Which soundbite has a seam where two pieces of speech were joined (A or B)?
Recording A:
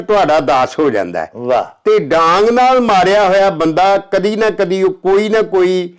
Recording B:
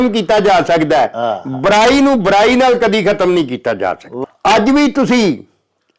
B